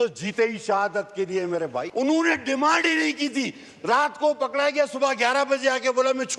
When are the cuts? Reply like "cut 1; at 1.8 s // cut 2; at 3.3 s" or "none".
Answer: cut 1; at 1.9 s